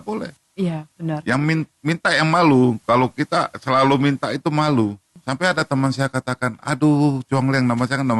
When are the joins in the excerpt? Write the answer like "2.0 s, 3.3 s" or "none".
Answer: 5.1 s